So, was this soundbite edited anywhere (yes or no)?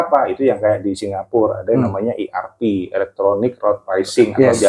no